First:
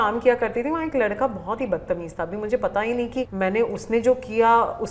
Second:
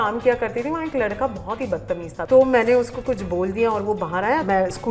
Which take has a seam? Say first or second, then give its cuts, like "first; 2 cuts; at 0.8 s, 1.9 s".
second; 1 cut; at 2.1 s